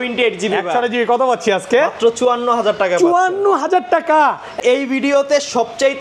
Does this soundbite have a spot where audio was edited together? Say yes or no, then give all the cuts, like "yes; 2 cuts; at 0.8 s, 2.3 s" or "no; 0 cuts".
yes; 1 cut; at 4.6 s